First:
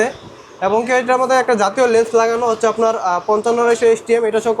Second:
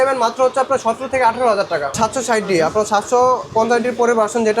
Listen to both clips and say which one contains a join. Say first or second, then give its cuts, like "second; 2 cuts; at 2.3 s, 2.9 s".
second; 1 cut; at 1.9 s